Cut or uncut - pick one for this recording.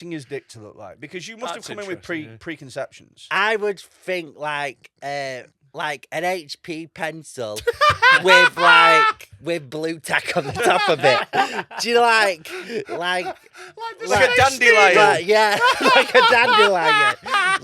uncut